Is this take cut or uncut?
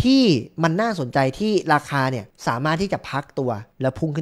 uncut